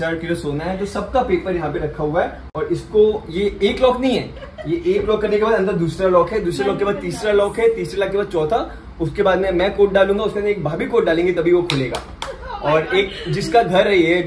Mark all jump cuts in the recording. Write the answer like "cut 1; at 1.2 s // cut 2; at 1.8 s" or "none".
none